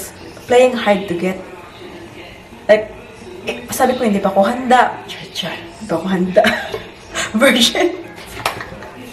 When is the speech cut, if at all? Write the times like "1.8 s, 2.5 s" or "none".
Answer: none